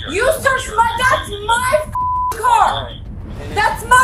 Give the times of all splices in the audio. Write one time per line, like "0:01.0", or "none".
none